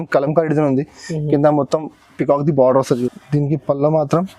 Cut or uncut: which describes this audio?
cut